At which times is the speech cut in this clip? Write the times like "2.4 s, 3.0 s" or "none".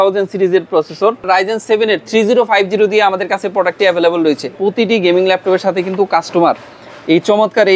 1.3 s, 4.5 s